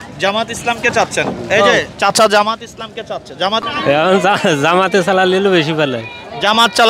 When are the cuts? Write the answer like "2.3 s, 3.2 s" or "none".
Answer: 3.6 s